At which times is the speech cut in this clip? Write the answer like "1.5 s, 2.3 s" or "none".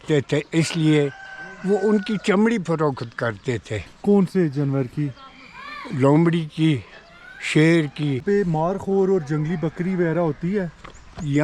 8.2 s